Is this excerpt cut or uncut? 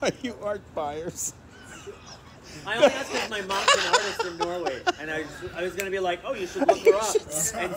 uncut